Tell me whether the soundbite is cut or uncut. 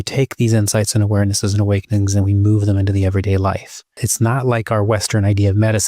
cut